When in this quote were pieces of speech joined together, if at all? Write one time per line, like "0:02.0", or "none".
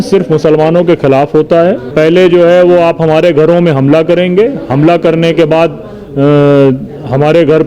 0:01.8